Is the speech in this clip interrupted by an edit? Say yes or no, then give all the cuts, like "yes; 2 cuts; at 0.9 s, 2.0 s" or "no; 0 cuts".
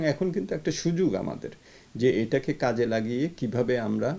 no; 0 cuts